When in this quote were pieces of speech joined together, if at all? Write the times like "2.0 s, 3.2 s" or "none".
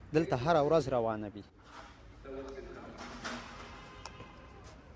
none